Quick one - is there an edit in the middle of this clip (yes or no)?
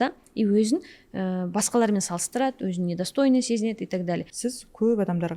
yes